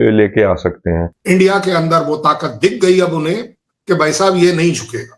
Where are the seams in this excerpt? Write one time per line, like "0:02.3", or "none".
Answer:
0:01.1